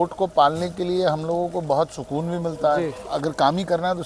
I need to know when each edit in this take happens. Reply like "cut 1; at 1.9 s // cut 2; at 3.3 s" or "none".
cut 1; at 3.0 s